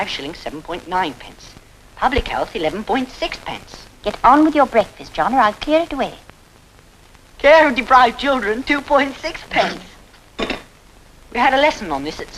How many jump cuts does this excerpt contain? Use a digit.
1